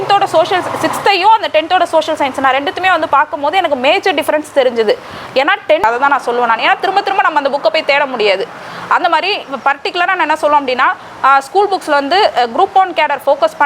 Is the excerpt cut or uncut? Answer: cut